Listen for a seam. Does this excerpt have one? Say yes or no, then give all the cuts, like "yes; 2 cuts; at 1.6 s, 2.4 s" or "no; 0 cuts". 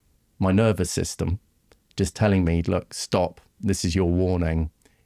no; 0 cuts